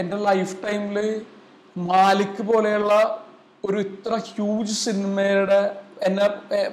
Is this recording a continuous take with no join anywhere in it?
yes; 0 cuts

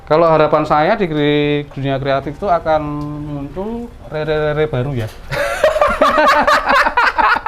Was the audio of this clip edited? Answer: no; 0 cuts

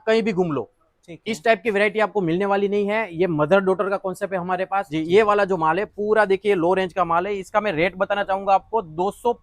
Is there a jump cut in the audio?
yes; 1 cut; at 4.9 s

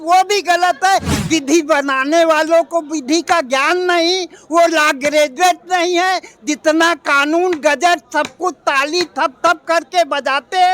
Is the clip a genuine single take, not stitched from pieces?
no; 1 cut; at 1.1 s

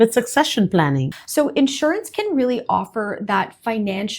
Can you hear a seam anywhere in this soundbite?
yes; 1 cut; at 1.2 s

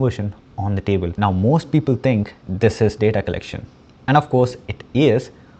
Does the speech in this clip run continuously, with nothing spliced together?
no; 1 cut; at 1.1 s

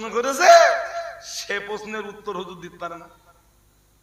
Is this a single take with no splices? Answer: yes; 0 cuts

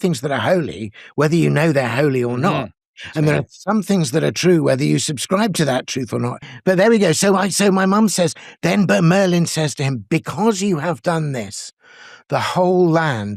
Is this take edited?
yes; 1 cut; at 6.5 s

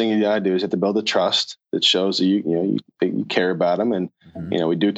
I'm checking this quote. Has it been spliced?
no; 0 cuts

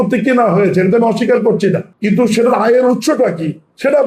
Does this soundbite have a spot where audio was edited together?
yes; 1 cut; at 1.9 s

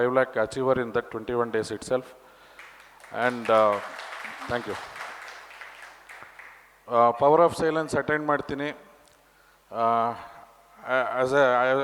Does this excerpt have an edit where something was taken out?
no; 0 cuts

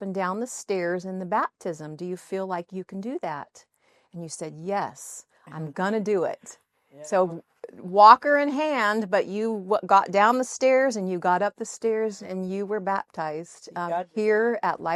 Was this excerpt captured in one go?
yes; 0 cuts

